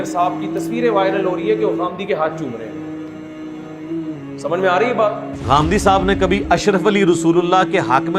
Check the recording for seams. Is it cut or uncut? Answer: cut